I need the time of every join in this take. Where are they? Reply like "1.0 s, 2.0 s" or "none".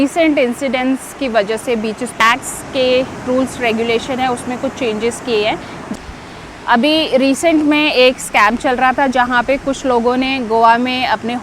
2.2 s, 6.0 s